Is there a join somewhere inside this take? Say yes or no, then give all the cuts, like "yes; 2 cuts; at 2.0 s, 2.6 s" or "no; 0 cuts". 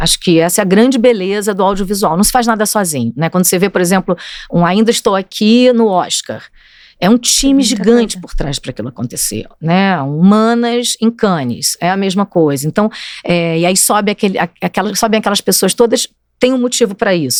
no; 0 cuts